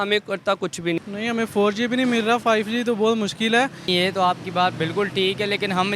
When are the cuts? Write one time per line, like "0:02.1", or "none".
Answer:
0:01.0
0:03.9